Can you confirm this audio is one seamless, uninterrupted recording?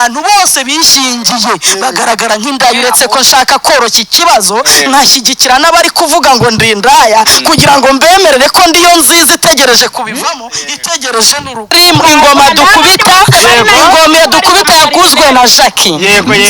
no; 1 cut; at 11.8 s

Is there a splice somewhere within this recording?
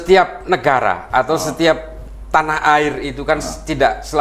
no; 0 cuts

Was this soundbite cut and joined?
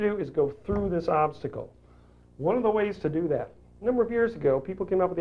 yes; 1 cut; at 3.7 s

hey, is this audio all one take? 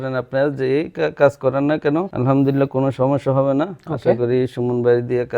no; 1 cut; at 2.1 s

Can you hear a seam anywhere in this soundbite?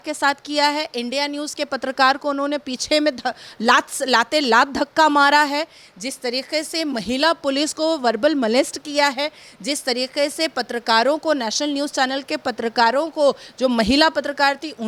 no; 0 cuts

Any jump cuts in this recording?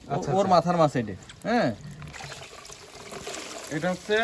yes; 1 cut; at 2.1 s

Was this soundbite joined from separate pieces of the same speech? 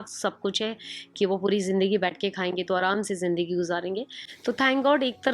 no; 0 cuts

